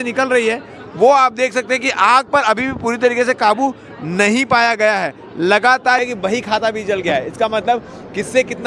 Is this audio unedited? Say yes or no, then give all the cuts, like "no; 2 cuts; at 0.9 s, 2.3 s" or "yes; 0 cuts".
no; 1 cut; at 6.0 s